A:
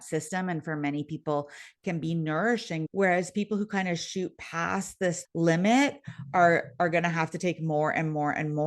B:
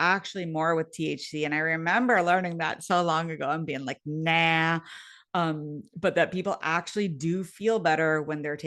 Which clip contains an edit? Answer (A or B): A